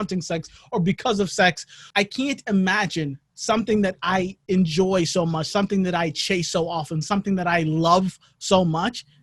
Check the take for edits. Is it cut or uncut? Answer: cut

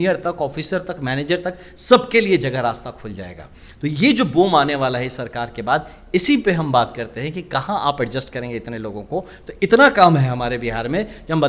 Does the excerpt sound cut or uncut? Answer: uncut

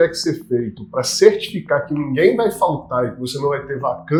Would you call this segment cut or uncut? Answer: uncut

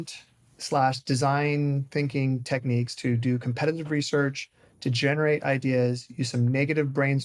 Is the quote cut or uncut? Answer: uncut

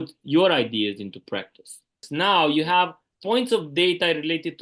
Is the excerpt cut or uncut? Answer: cut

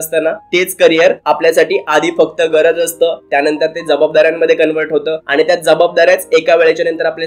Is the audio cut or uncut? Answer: uncut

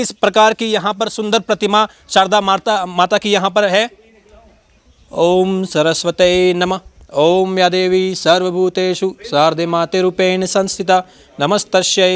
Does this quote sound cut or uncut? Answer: uncut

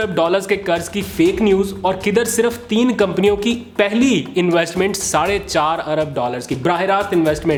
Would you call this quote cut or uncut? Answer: uncut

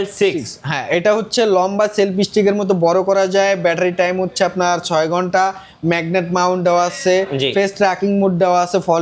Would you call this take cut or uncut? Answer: uncut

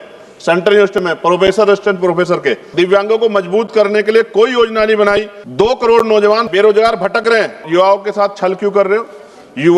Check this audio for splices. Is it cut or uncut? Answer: cut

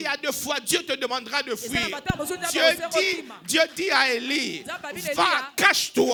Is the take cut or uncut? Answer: uncut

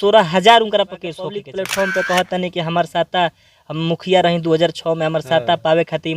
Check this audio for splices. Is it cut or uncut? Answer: cut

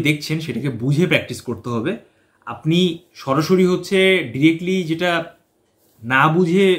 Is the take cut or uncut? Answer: uncut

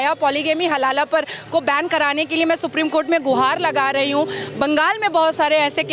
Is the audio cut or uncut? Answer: uncut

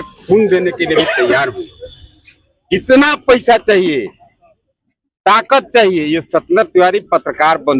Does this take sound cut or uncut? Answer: uncut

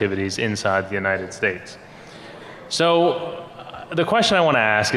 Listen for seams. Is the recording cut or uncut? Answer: cut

